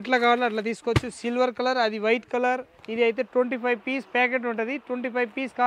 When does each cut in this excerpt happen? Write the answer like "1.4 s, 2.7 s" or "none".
2.8 s